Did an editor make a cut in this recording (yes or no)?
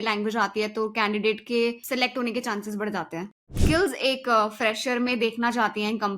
yes